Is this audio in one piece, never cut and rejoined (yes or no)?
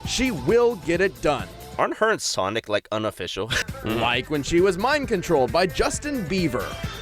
no